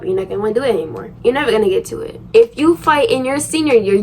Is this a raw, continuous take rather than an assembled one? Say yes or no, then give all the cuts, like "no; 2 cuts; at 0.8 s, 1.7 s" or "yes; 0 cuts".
no; 2 cuts; at 1.1 s, 2.2 s